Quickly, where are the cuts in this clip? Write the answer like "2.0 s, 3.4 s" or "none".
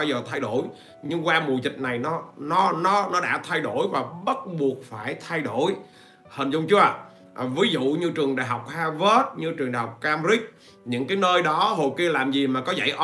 none